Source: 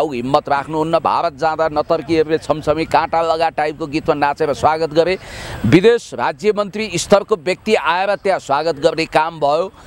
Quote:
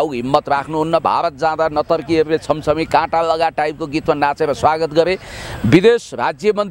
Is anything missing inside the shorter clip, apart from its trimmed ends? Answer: no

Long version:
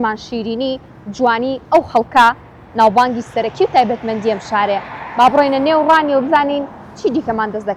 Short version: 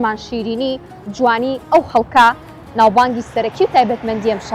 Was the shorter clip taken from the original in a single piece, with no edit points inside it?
yes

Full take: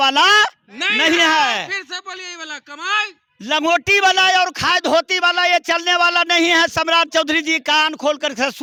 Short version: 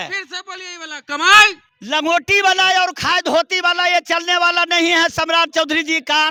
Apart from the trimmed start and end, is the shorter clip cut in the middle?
no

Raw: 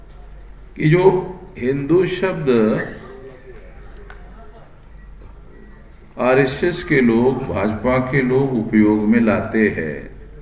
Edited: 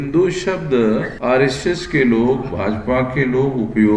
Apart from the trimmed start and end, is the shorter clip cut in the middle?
yes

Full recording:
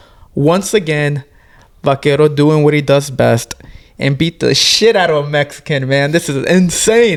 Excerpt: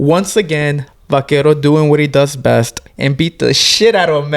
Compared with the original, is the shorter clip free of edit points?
no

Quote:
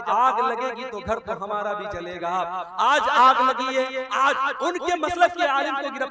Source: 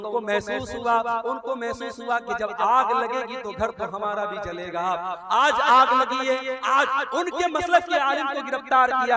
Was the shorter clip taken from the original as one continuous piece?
yes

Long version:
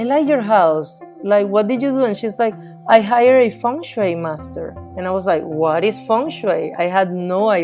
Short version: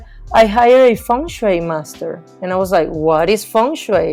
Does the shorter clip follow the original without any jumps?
yes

